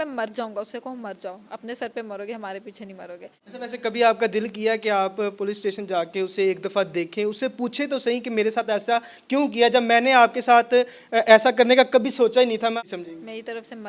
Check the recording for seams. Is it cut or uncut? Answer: cut